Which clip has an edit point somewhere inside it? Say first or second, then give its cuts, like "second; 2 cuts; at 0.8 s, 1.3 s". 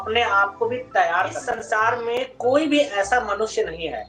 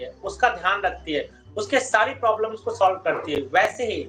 first; 1 cut; at 1.5 s